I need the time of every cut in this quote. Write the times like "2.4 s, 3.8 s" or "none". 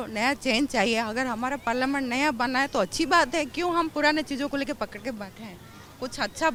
none